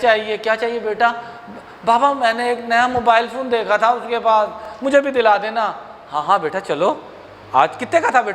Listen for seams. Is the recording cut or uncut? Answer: uncut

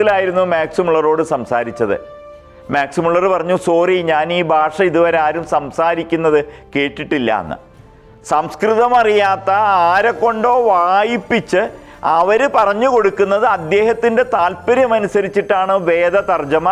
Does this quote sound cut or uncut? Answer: uncut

